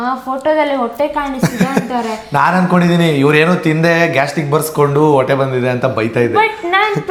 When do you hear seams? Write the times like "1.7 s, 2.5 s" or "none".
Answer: none